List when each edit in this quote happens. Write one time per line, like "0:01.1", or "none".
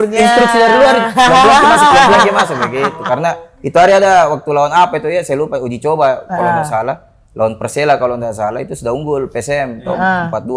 none

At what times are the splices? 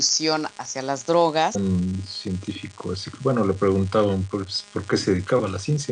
none

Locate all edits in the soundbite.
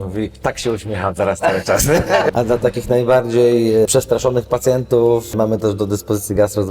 0:02.3
0:03.9
0:05.3

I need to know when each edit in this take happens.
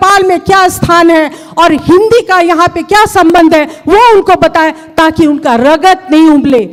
none

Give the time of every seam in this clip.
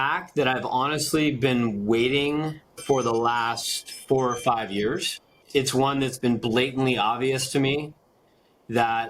0:05.4

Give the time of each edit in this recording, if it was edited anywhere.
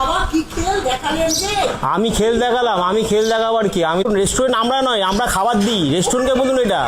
0:04.0

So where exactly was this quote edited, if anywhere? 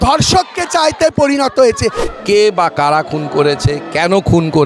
0:02.1

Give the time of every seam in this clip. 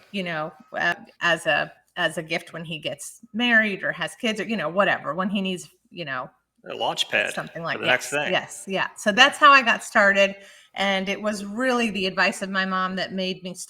0:00.9

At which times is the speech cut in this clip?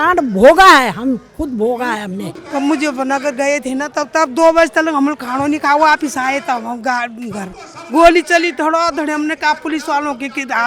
0:02.4

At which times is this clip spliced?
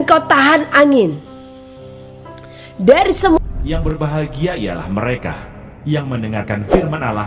0:03.4

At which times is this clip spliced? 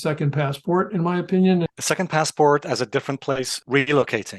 0:01.7

